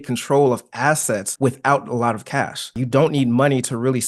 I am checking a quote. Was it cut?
yes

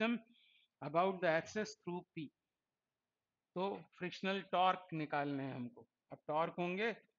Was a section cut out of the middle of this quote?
no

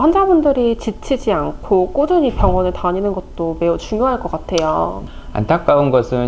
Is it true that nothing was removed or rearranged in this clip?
no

